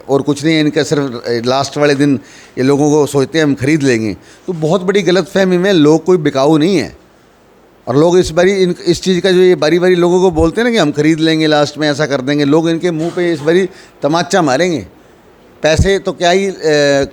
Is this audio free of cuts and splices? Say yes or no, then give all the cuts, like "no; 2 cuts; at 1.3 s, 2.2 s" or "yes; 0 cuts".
yes; 0 cuts